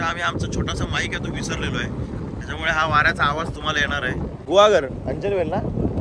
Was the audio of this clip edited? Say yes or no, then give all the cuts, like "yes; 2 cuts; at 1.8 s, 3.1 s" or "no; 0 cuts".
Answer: no; 0 cuts